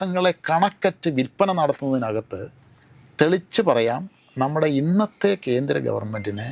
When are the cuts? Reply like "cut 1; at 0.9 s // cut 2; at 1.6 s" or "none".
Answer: none